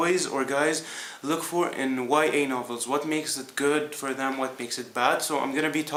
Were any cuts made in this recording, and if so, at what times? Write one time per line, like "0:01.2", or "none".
none